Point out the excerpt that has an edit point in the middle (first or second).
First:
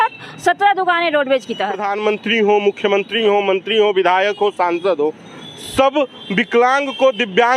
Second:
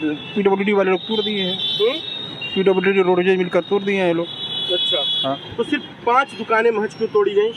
first